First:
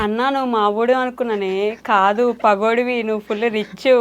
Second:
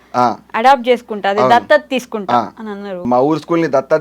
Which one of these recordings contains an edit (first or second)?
second